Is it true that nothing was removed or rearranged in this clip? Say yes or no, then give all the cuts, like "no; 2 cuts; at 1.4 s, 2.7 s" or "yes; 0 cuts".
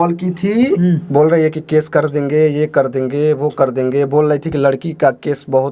yes; 0 cuts